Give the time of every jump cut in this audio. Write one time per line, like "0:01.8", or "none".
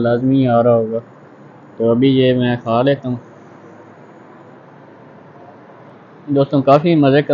0:05.9